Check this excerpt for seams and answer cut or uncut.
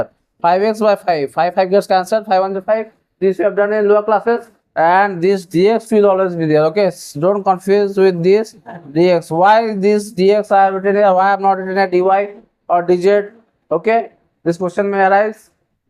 cut